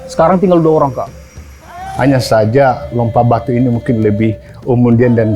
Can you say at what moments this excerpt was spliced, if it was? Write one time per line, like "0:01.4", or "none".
0:01.8